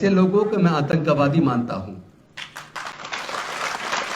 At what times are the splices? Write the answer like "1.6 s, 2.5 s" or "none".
none